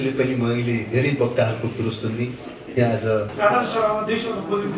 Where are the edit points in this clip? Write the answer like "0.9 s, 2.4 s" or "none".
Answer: 3.3 s

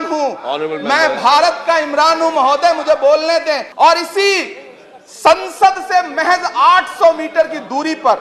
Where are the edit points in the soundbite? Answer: 3.7 s

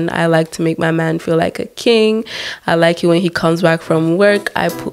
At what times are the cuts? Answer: none

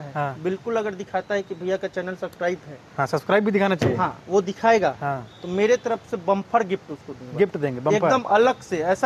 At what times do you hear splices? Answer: none

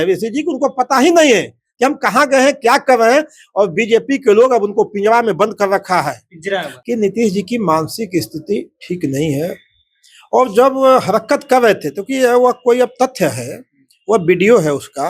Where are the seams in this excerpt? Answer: 6.7 s

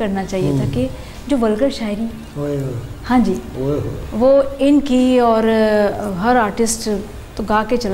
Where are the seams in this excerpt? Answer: none

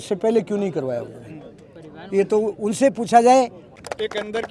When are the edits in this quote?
3.6 s

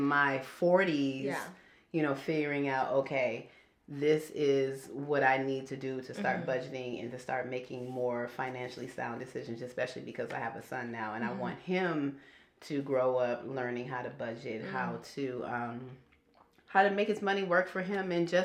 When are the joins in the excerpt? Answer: none

